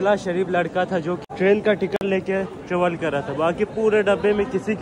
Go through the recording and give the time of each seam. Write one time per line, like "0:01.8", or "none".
0:01.2